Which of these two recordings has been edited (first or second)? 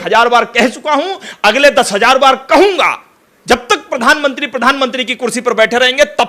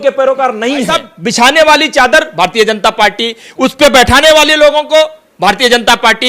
second